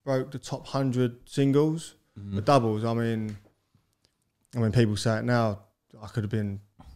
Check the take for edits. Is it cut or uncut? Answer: uncut